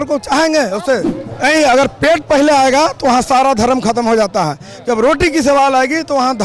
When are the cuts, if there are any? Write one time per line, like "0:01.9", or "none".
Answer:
0:01.2